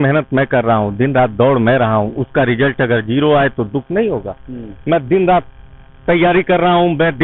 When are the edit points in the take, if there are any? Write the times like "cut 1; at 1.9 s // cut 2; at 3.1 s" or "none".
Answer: none